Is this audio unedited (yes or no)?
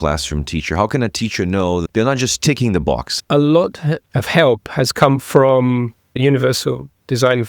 no